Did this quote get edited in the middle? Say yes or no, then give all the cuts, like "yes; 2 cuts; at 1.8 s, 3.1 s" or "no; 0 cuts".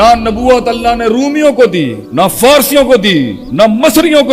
yes; 2 cuts; at 2.0 s, 3.4 s